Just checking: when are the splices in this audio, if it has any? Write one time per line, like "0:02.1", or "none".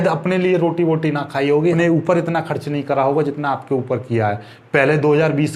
0:01.7